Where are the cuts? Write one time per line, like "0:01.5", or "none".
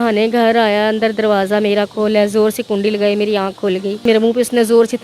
0:04.0